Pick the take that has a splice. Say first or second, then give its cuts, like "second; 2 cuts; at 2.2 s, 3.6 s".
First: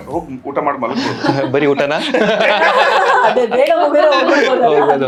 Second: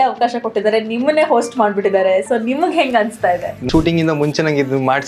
second; 1 cut; at 3.7 s